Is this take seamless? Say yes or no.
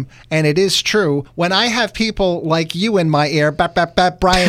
no